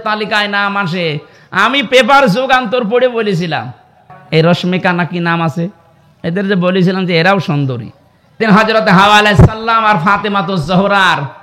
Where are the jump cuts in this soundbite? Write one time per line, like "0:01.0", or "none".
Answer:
0:04.1
0:08.4

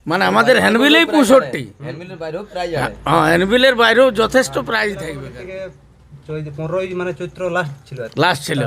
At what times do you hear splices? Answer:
0:05.1

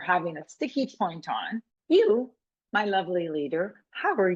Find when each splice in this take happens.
0:01.7

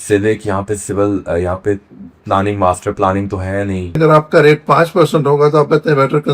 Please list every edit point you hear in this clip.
0:04.0

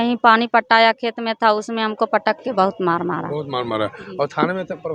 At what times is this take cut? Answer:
none

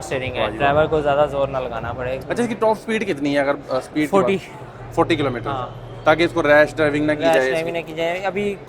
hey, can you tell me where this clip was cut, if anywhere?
0:02.2

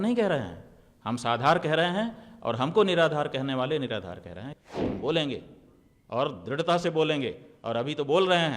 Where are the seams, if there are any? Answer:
0:04.5

